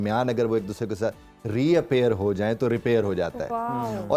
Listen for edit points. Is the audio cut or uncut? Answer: uncut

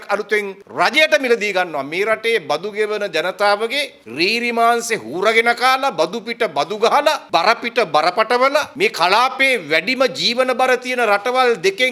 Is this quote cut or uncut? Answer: uncut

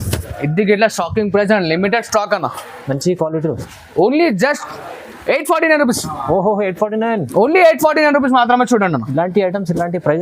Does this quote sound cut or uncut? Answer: uncut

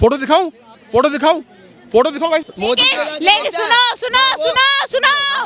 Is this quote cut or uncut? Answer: cut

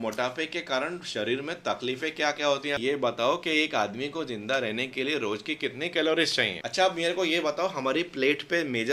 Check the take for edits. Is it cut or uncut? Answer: cut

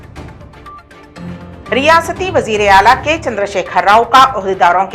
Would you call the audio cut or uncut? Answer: cut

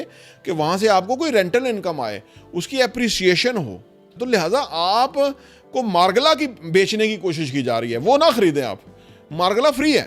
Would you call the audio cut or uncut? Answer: cut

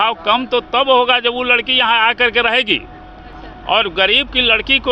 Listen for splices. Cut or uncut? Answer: uncut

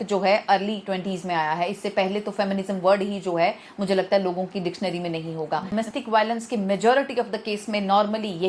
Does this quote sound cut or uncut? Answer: cut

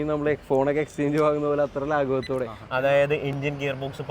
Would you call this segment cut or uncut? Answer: cut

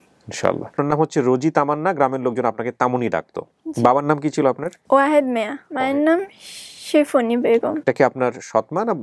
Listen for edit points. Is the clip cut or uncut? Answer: cut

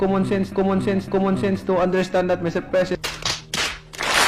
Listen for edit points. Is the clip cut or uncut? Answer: uncut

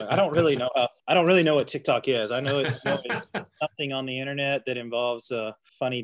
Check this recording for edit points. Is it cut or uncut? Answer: cut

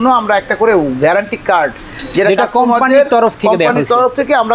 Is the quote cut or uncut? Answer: uncut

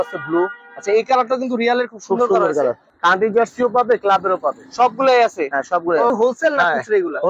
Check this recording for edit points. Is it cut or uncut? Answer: cut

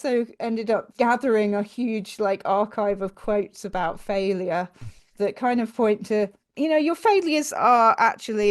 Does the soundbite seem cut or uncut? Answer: cut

